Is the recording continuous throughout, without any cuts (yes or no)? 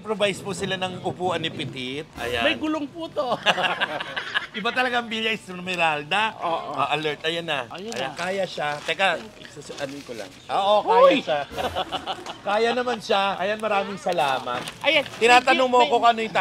yes